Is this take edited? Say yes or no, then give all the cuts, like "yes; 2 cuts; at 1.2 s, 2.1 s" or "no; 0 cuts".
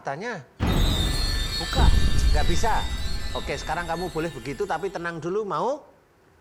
no; 0 cuts